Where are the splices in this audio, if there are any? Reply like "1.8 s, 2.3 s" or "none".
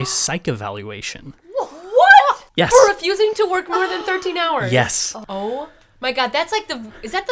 2.4 s, 5.1 s